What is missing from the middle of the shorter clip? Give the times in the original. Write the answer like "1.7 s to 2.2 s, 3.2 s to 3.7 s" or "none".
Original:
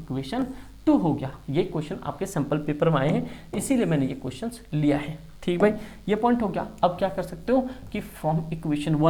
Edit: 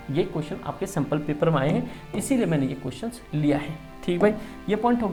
none